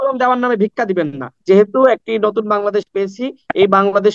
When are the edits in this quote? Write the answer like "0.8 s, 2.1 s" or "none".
1.3 s